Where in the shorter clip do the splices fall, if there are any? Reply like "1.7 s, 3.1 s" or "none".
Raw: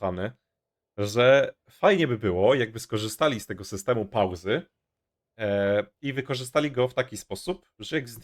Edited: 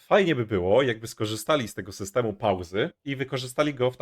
3.0 s